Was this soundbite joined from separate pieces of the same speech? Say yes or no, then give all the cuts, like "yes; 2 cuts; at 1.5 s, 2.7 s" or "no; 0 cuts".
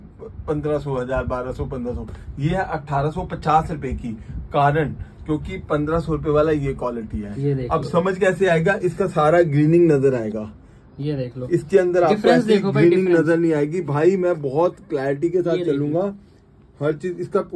no; 0 cuts